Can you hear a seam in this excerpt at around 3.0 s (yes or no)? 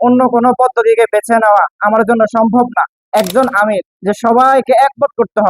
yes